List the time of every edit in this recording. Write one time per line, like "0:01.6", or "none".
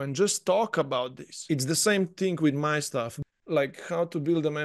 0:01.4
0:03.2